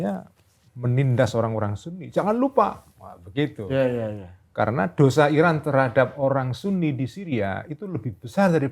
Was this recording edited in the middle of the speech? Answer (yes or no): no